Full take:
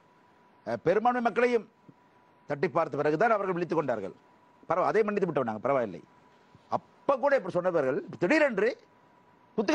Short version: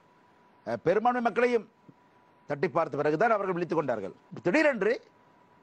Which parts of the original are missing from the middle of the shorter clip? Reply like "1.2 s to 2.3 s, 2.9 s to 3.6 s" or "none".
4.3 s to 8.1 s